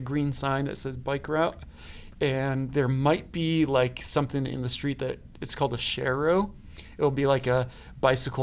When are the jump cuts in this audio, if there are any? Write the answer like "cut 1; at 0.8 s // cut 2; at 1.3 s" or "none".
none